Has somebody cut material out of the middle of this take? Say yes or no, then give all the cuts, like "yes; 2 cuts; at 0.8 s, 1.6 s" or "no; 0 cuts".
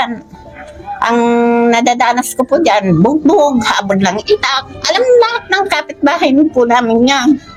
no; 0 cuts